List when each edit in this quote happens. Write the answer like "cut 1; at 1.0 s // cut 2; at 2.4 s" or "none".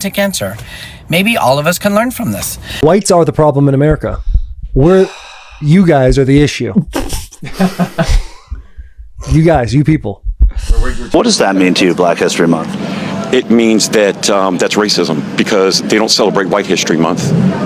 cut 1; at 2.7 s // cut 2; at 11.0 s

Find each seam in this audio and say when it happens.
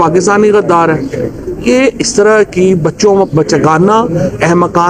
none

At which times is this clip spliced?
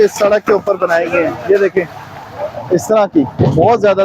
none

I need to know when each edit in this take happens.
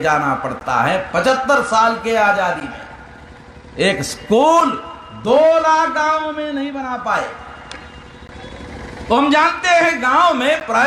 none

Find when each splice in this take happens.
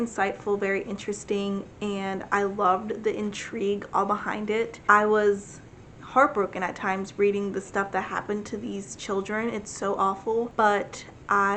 none

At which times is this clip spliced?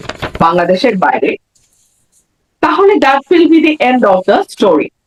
none

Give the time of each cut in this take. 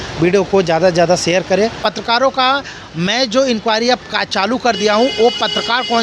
cut 1; at 1.9 s

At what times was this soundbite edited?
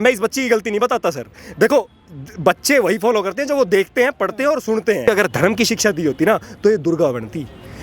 cut 1; at 5.1 s

